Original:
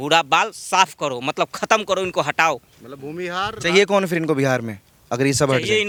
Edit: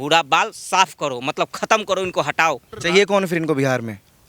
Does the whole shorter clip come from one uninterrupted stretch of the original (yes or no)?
no